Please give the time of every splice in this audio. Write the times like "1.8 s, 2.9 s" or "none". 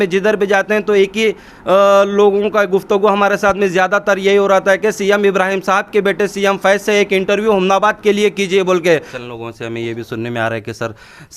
9.1 s